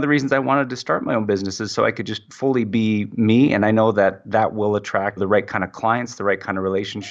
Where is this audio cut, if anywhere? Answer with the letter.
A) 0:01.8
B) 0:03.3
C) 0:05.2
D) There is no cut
C